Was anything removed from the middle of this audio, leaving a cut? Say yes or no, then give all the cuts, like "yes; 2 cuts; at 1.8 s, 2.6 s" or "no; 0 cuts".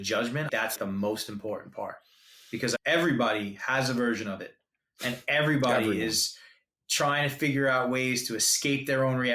yes; 3 cuts; at 0.7 s, 2.8 s, 6.8 s